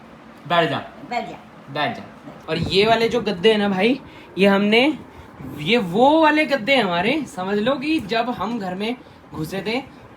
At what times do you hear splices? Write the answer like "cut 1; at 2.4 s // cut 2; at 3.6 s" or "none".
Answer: cut 1; at 2.3 s